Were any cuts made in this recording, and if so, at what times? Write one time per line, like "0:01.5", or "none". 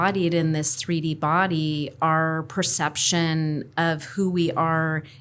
none